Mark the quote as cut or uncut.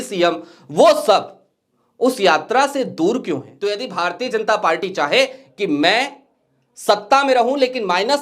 cut